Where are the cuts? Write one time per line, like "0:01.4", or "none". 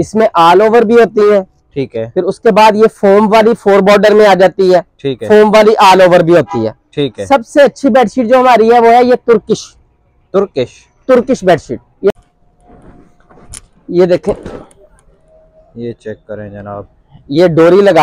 0:12.1

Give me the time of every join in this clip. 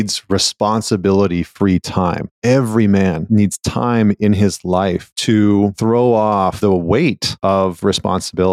0:02.3
0:03.2
0:05.1
0:05.8
0:06.6
0:07.3

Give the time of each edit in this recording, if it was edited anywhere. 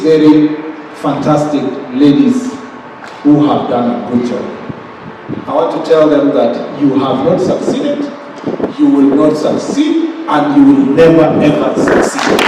none

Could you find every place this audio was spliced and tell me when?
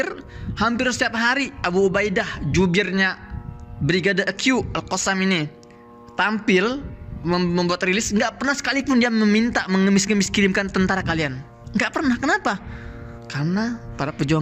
none

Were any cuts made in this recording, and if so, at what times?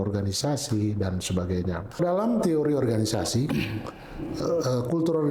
0:02.0

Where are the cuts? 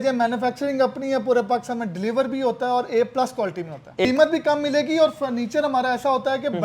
0:04.0

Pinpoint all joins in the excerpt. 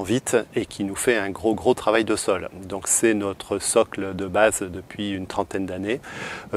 none

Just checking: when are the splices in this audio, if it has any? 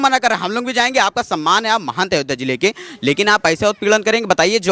none

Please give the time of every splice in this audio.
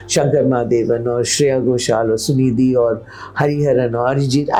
none

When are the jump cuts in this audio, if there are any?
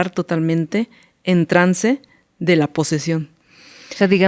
none

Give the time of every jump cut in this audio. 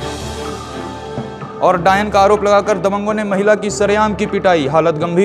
none

